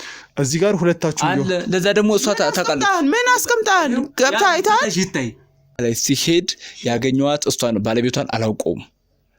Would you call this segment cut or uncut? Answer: cut